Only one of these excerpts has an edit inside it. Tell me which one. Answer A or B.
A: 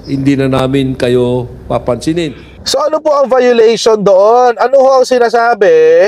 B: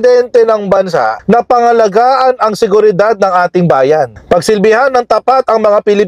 A